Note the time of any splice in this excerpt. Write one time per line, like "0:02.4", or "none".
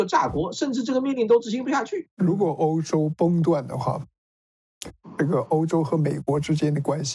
0:02.0